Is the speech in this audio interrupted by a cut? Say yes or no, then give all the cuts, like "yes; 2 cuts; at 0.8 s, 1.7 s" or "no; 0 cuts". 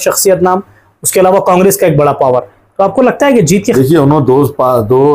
yes; 1 cut; at 3.7 s